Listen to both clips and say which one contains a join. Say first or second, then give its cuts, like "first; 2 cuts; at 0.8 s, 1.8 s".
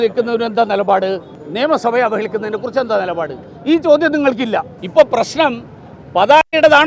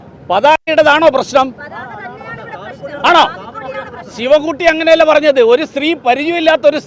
first; 2 cuts; at 1.4 s, 4.8 s